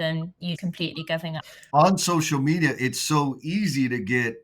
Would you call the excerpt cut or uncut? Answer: uncut